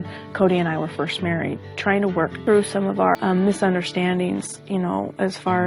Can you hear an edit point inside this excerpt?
yes; 2 cuts; at 2.4 s, 3.2 s

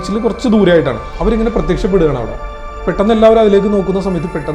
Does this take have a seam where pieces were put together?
yes; 1 cut; at 1.0 s

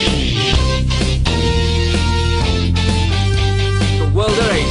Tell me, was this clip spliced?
no; 0 cuts

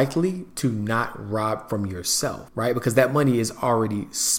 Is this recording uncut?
no; 1 cut; at 2.4 s

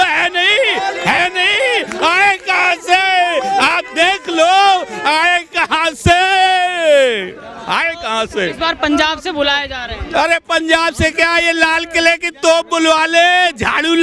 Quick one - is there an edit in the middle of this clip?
no; 0 cuts

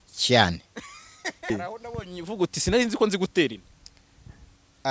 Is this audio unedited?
no; 1 cut; at 1.5 s

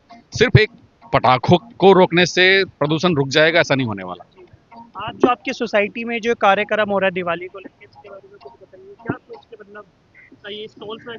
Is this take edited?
no; 0 cuts

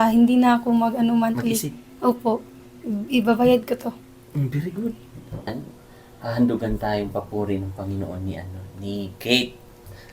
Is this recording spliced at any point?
yes; 1 cut; at 5.8 s

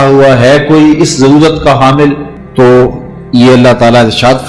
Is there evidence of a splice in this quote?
yes; 1 cut; at 2.3 s

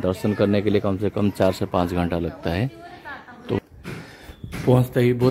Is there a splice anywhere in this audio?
yes; 1 cut; at 3.6 s

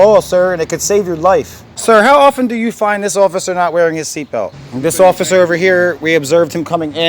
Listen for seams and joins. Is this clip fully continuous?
no; 2 cuts; at 1.6 s, 4.6 s

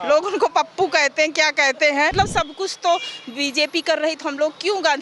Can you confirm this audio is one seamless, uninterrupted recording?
no; 1 cut; at 2.1 s

